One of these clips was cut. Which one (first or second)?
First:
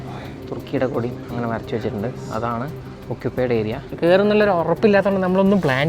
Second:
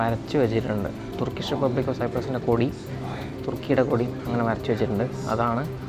first